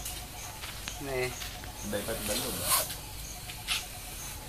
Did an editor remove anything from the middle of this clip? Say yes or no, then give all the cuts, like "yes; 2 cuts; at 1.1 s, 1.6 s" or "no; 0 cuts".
yes; 1 cut; at 2.6 s